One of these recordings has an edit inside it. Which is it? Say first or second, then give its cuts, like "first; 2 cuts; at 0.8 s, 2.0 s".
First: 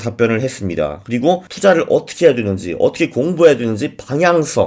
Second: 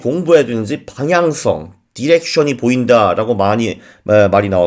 first; 1 cut; at 1.5 s